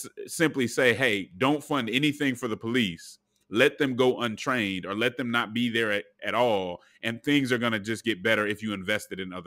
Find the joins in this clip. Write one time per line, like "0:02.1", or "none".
none

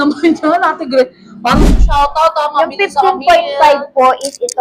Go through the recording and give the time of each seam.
0:01.7

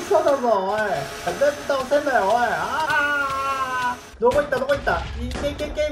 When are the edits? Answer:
0:01.3
0:02.9
0:04.1

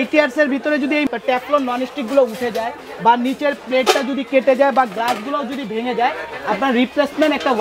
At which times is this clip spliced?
0:01.1

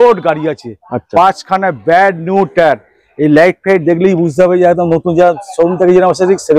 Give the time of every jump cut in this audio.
none

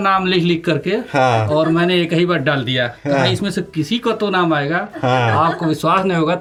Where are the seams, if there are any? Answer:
none

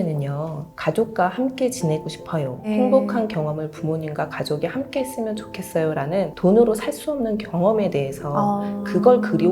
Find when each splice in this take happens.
0:02.6

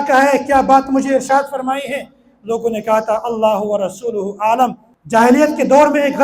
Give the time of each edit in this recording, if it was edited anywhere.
0:04.9

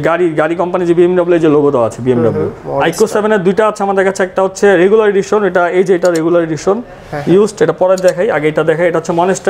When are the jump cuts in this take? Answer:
0:02.6

